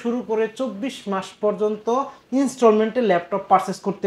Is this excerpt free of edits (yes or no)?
yes